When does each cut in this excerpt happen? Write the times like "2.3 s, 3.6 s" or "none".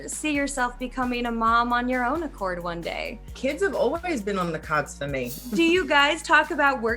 3.3 s, 5.3 s